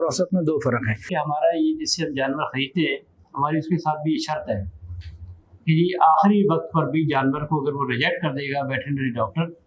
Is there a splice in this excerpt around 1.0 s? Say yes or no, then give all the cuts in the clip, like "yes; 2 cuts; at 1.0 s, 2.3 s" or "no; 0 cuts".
yes; 1 cut; at 1.0 s